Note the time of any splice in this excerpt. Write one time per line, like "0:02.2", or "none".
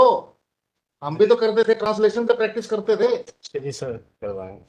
none